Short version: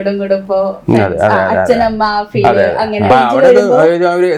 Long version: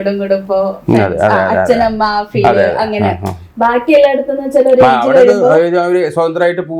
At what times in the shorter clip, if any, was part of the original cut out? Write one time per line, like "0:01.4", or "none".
0:03.1